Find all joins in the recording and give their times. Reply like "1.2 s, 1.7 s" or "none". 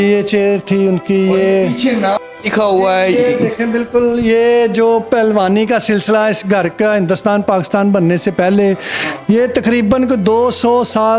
none